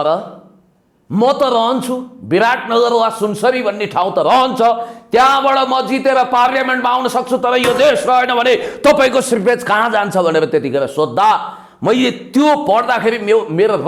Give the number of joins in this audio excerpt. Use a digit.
0